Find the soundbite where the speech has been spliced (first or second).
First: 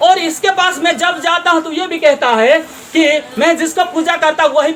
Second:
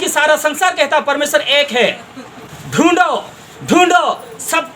second